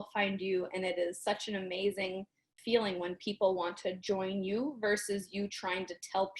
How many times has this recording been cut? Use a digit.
1